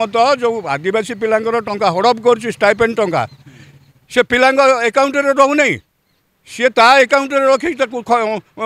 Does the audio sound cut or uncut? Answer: uncut